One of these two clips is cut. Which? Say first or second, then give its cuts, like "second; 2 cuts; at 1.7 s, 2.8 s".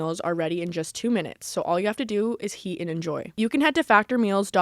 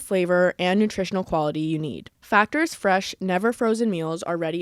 first; 1 cut; at 3.3 s